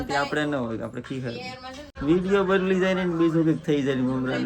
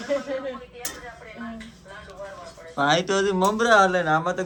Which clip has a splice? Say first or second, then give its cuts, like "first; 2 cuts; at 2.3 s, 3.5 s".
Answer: first; 1 cut; at 1.9 s